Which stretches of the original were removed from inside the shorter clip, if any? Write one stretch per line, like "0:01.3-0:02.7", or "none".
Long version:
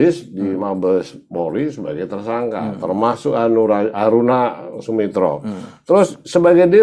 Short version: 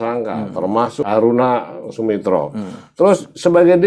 0:03.3-0:03.9